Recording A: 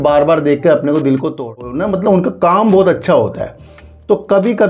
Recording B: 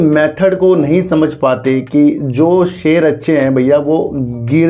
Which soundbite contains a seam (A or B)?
A